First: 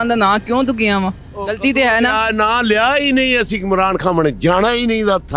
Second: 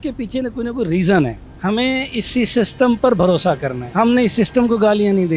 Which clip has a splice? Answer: second; 2 cuts; at 1.5 s, 3.8 s

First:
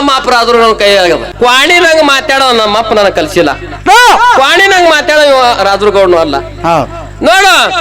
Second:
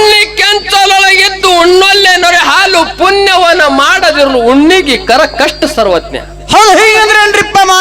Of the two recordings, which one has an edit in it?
first; 1 cut; at 1.3 s

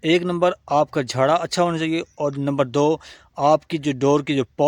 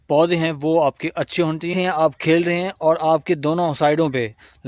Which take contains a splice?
second; 1 cut; at 1.7 s

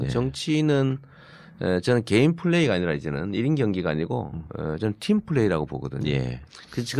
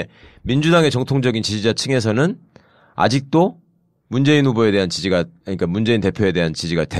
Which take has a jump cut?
second; 1 cut; at 2.8 s

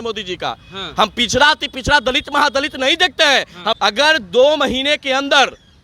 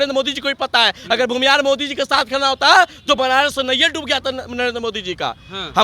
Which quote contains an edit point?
first; 1 cut; at 3.8 s

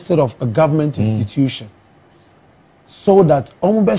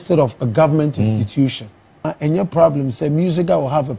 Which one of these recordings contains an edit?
second; 1 cut; at 2.1 s

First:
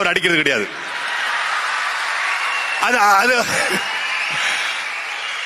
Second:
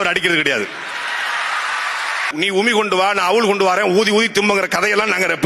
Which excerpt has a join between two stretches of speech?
second; 1 cut; at 2.3 s

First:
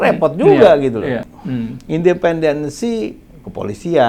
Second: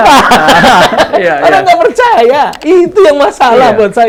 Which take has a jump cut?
first; 1 cut; at 1.3 s

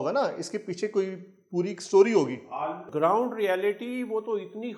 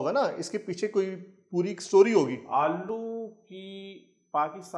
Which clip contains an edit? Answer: first; 1 cut; at 2.9 s

